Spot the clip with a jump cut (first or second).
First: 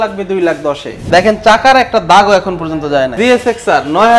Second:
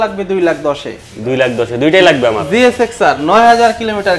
first